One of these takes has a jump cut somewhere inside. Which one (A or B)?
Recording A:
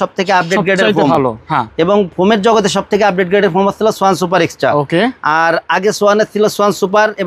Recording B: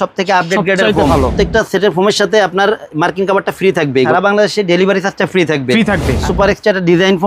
B